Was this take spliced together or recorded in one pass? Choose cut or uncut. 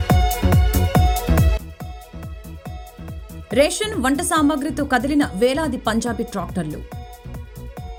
uncut